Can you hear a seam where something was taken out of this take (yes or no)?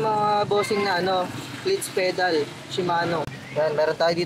yes